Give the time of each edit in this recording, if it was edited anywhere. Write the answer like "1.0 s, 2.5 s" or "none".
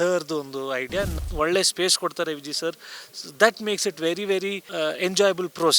1.2 s, 4.6 s